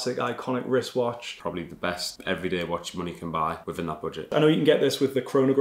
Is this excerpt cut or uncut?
cut